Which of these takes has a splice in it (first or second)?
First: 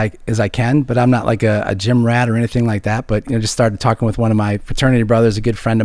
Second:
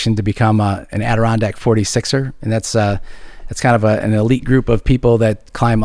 first